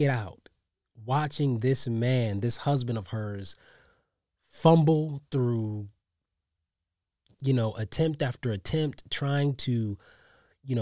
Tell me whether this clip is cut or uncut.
uncut